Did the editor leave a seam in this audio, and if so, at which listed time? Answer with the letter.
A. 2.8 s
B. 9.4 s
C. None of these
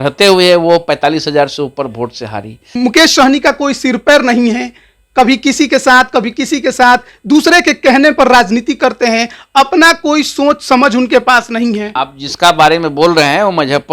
A